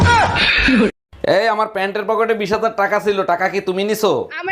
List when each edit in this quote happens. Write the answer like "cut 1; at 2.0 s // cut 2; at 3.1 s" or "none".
cut 1; at 0.9 s